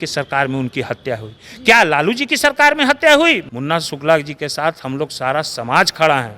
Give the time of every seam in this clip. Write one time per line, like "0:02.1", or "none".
0:03.4